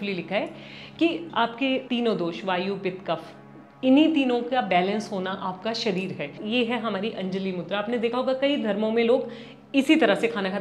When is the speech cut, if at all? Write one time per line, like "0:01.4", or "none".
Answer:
0:01.4
0:06.4